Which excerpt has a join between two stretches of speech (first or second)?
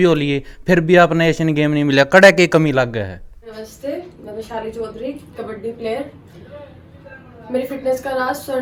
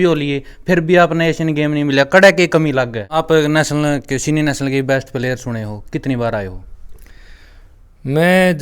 second